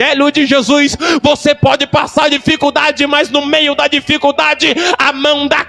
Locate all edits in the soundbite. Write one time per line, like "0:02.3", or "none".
none

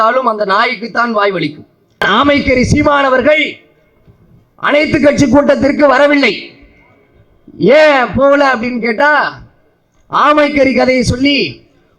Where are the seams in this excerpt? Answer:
0:02.0

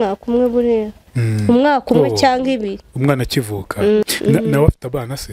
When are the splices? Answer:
0:04.0

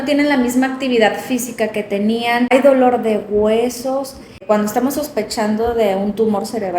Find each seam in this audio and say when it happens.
0:02.5
0:04.4

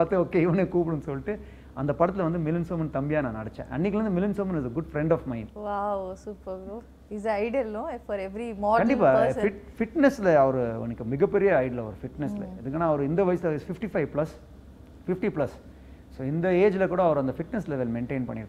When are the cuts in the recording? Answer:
none

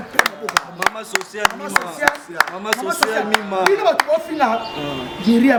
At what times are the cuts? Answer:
none

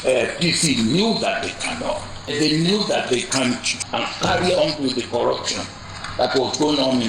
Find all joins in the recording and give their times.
0:02.3
0:03.8

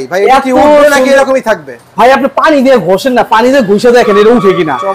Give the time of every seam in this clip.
none

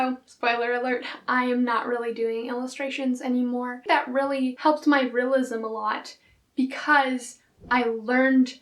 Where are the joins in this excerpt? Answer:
0:03.8

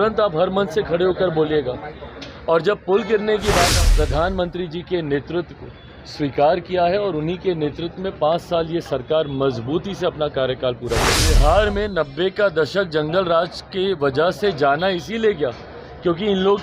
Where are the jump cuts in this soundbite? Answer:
0:03.7
0:11.3

